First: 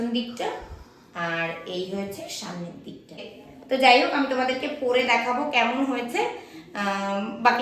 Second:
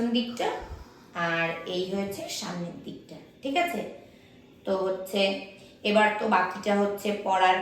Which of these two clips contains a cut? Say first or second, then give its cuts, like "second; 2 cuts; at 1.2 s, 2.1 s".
first; 1 cut; at 3.3 s